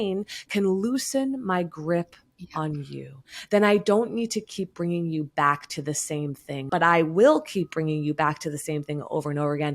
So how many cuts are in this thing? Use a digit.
1